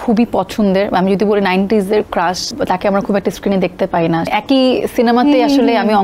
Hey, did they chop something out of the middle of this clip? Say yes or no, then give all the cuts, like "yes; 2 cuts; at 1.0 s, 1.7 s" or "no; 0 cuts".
yes; 2 cuts; at 2.5 s, 4.3 s